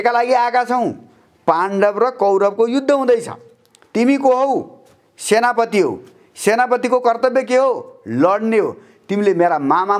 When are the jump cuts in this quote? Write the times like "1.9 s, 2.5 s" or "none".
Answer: none